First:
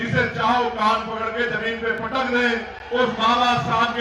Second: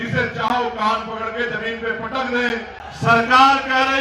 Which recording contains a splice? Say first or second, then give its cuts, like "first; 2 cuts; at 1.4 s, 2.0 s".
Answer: second; 1 cut; at 2.8 s